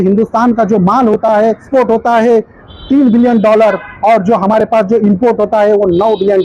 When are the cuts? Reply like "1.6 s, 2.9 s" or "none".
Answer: 1.6 s